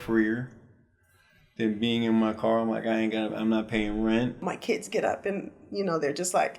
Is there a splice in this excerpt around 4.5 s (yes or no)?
yes